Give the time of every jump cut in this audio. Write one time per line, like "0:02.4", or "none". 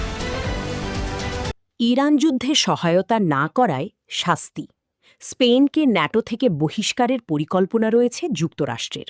0:01.6